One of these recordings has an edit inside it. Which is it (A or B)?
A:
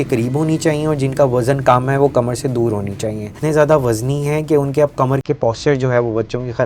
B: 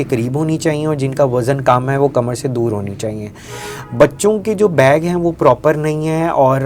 A